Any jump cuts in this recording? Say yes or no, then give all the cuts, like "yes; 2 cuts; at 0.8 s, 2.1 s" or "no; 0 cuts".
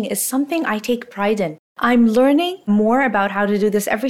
yes; 2 cuts; at 1.6 s, 2.6 s